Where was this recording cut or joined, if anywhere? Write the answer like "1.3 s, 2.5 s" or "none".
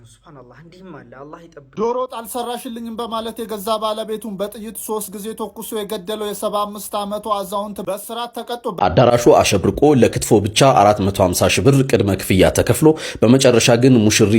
1.6 s, 8.7 s